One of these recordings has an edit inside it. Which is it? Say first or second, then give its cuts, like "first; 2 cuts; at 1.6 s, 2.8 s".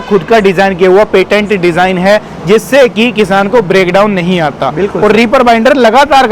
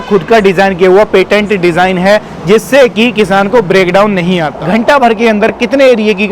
second; 1 cut; at 4.5 s